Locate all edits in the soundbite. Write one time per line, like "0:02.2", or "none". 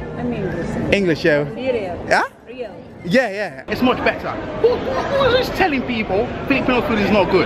0:03.6

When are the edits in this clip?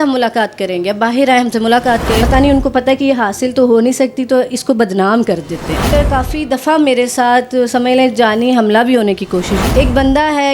0:02.2
0:05.9
0:09.6

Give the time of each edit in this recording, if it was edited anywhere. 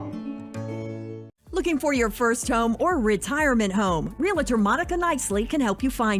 0:01.3

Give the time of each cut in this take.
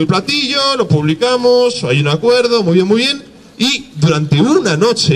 none

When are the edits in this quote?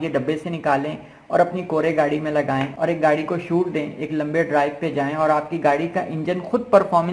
none

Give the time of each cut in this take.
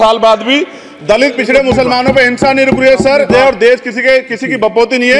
0:03.3

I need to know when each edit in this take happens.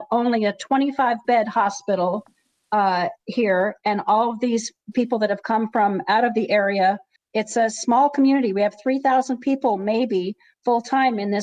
0:07.1

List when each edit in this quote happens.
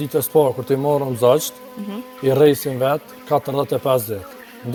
none

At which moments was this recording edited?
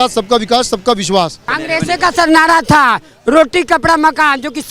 0:01.5

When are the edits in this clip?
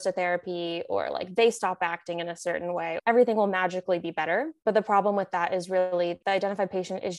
0:03.0
0:04.5
0:06.2

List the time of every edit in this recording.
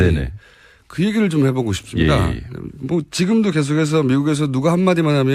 0:03.3

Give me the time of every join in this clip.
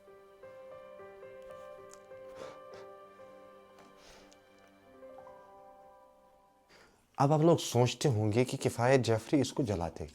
0:06.8

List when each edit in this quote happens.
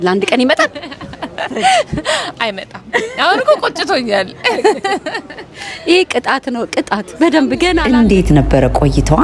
0:07.8

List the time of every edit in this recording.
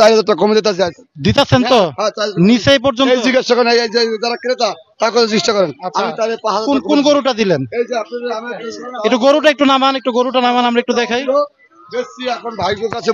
none

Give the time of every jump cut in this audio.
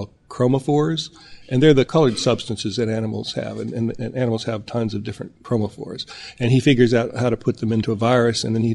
0:01.9
0:05.3
0:07.8

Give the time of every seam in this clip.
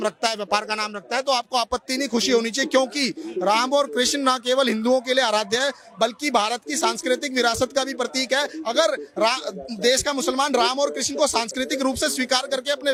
none

